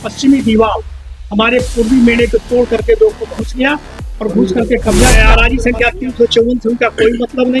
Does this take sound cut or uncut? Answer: cut